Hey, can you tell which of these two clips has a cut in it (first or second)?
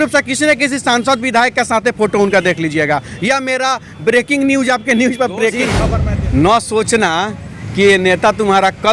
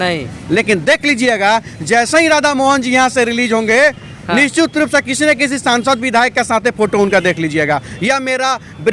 first